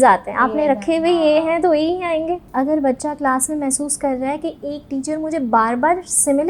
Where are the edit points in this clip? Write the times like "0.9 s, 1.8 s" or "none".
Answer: 2.4 s